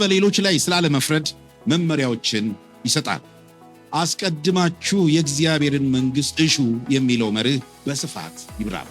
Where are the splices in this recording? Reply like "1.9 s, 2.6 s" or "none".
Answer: 8.0 s

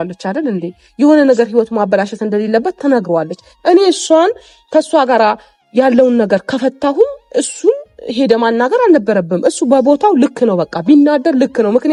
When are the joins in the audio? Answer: none

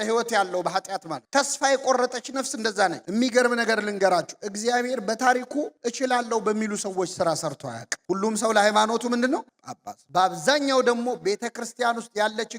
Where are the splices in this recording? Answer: 3.0 s, 7.9 s

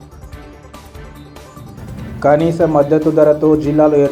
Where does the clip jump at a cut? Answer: 1.0 s

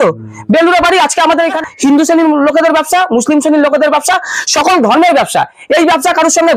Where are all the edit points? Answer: 1.6 s

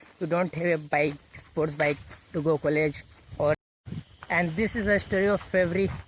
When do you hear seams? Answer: 3.5 s

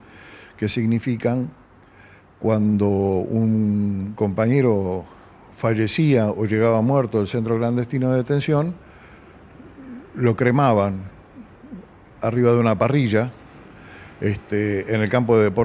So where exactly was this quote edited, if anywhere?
none

